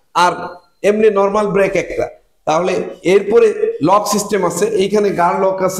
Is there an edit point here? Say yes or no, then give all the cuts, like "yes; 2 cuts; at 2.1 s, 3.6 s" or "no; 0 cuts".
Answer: no; 0 cuts